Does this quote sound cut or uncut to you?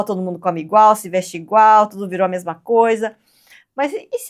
uncut